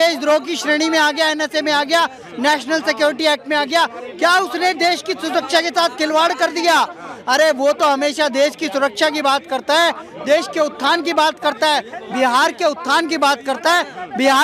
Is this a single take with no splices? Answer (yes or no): yes